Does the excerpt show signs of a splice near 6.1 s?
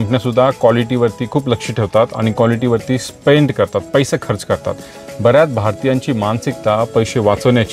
no; 0 cuts

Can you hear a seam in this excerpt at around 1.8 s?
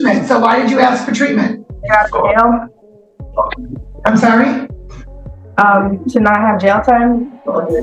yes; 1 cut; at 1.8 s

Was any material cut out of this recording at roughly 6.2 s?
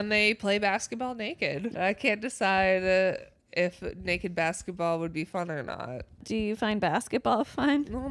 yes; 2 cuts; at 1.7 s, 6.2 s

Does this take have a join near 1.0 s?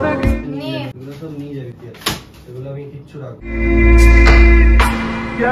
yes; 1 cut; at 1.0 s

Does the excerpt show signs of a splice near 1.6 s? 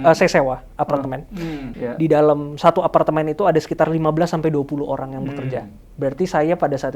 yes; 1 cut; at 1.6 s

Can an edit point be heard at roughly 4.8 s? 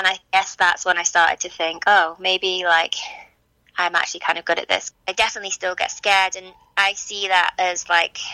yes; 1 cut; at 4.8 s

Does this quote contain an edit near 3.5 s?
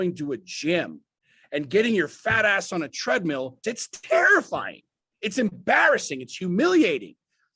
yes; 1 cut; at 3.5 s

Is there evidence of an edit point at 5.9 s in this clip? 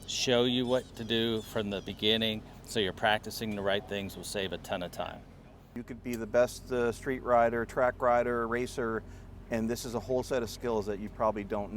yes; 1 cut; at 5.9 s

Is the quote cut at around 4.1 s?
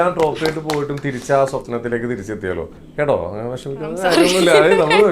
no; 1 cut; at 2.8 s

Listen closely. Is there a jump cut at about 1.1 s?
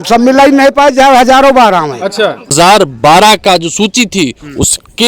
no; 1 cut; at 2.5 s

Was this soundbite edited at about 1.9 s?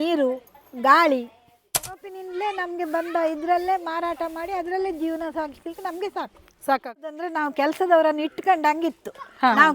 yes; 2 cuts; at 1.9 s, 7.2 s

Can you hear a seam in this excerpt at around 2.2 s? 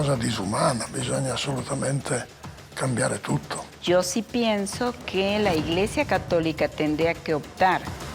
no; 1 cut; at 3.7 s

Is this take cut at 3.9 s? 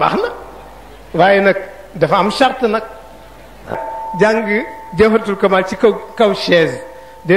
yes; 1 cut; at 3.9 s

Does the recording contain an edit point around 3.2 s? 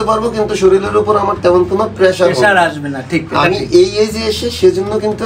no; 0 cuts

